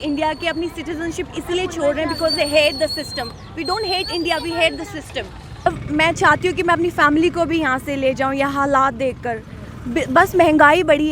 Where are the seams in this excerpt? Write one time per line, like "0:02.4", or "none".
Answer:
0:05.7